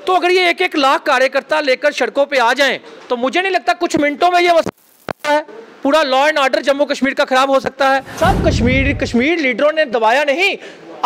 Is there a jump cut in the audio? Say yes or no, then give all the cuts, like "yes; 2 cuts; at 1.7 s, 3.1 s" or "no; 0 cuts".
yes; 1 cut; at 8.1 s